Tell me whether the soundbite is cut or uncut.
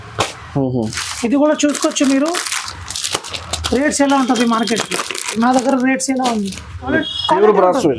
cut